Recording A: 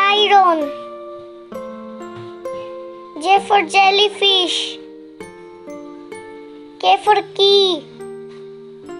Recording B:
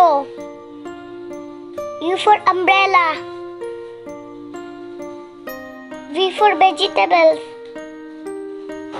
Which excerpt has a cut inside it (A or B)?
A